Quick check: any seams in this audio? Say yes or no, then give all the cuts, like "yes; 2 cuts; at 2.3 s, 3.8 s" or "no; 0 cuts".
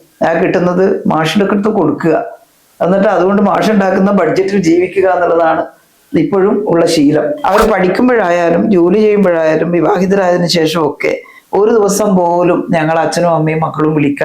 yes; 1 cut; at 7.4 s